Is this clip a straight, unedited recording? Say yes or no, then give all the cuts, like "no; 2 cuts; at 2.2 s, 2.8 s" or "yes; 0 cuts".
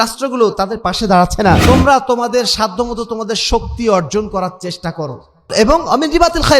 no; 2 cuts; at 1.6 s, 5.5 s